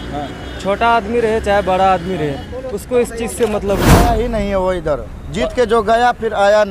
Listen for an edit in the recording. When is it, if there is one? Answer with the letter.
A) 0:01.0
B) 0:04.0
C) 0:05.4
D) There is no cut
B